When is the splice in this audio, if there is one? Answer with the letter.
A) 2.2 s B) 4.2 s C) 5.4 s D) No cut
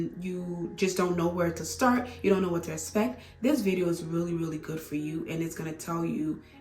D